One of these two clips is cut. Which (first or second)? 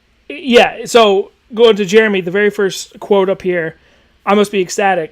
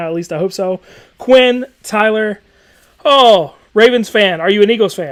first